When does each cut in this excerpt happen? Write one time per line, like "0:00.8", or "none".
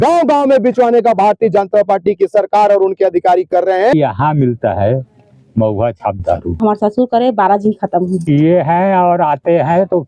0:03.9
0:06.6
0:08.2